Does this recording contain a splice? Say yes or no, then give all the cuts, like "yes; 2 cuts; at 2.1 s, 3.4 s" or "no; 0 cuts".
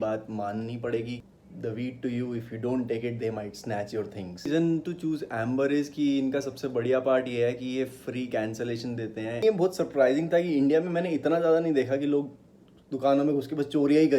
yes; 3 cuts; at 1.2 s, 4.5 s, 9.4 s